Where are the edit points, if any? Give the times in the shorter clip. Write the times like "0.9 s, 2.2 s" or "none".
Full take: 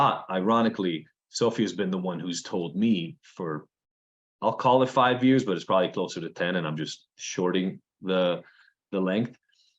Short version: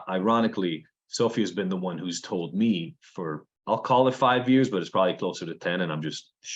3.5 s